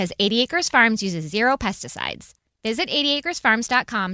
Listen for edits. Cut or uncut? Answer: uncut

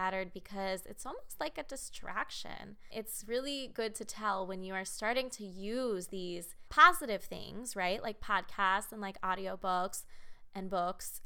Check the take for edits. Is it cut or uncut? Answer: cut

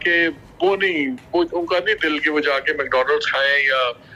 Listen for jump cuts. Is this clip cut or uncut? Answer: uncut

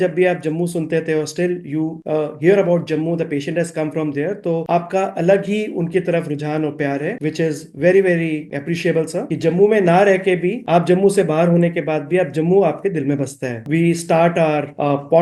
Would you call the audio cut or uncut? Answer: uncut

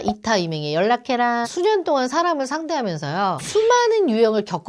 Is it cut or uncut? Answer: cut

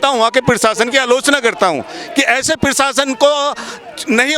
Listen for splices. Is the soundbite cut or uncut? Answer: uncut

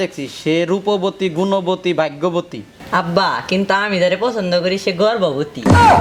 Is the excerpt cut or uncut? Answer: uncut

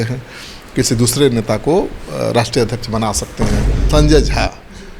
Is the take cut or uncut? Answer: cut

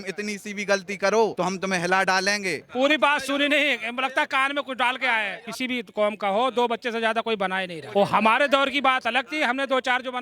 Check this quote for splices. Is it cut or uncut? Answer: cut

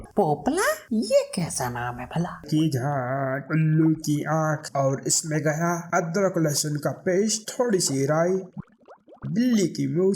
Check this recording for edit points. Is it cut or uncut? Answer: cut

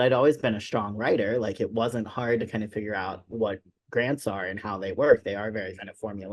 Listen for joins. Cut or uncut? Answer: uncut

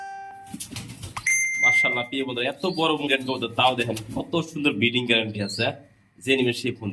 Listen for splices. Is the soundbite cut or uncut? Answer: uncut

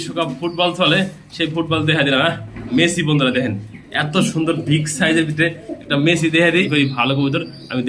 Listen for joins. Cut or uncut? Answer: cut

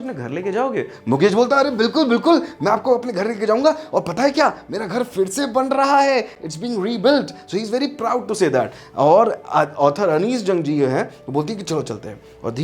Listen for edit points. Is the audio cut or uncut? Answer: uncut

